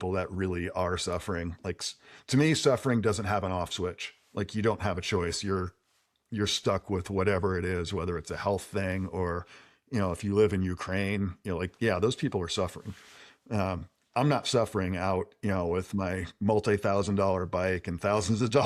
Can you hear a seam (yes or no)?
no